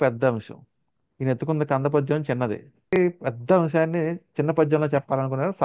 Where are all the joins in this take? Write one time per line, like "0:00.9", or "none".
0:03.0

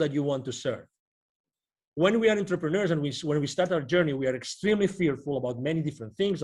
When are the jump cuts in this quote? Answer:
none

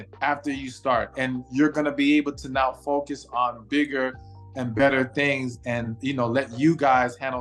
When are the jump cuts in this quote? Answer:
none

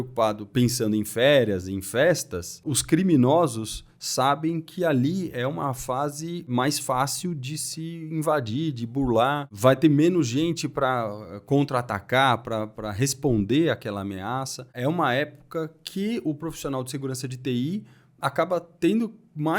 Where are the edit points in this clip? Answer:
0:02.8
0:06.5
0:09.5
0:14.7

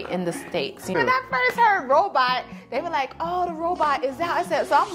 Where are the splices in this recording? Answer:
0:00.9

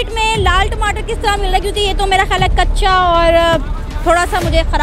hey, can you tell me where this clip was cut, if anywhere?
none

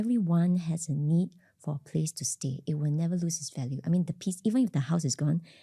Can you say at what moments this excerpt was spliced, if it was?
none

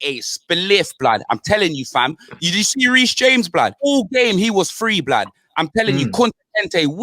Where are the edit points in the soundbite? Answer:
0:03.7

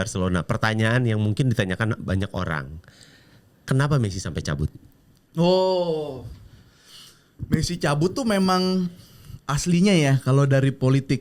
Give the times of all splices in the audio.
none

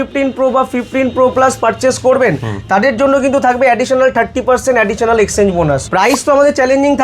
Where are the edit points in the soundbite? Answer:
0:05.9

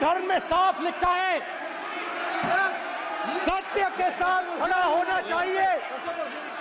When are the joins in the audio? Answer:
none

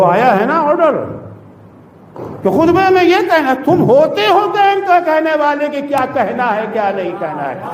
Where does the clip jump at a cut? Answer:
none

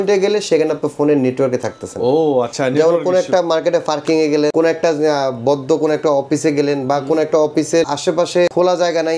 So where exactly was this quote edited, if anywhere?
0:04.5
0:08.2

